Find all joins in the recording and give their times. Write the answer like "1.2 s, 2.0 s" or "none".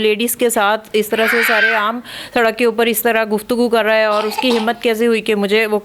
none